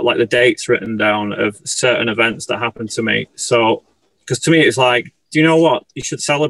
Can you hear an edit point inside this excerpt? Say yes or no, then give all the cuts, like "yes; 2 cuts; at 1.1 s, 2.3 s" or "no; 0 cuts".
no; 0 cuts